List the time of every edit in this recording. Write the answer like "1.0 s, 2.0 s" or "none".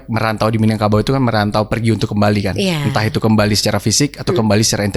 none